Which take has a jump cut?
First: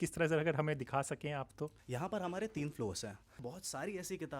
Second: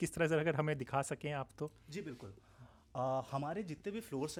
first; 2 cuts; at 1.8 s, 3.3 s

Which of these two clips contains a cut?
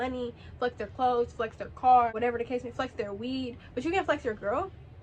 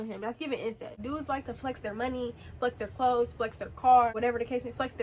second; 1 cut; at 1.0 s

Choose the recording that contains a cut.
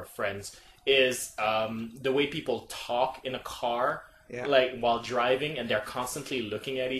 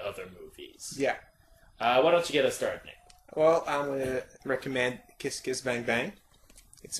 first; 1 cut; at 1.7 s

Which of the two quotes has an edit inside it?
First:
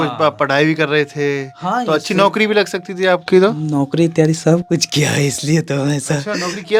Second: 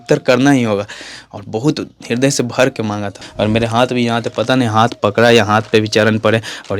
second; 1 cut; at 3.2 s

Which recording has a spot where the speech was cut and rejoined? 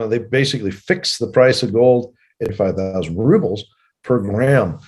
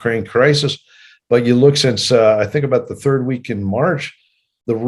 first; 1 cut; at 2.5 s

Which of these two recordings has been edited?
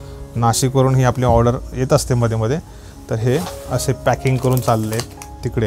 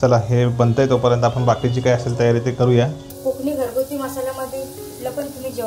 second; 1 cut; at 3.1 s

